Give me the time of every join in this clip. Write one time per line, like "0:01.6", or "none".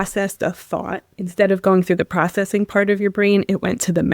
0:01.1